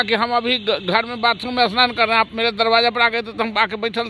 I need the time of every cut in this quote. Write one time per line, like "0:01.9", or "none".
none